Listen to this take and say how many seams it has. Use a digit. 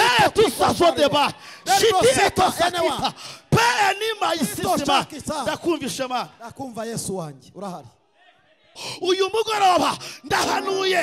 1